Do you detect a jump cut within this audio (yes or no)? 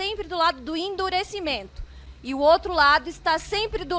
no